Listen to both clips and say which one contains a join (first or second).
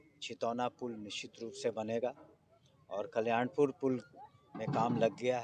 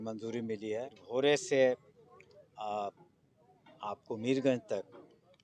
second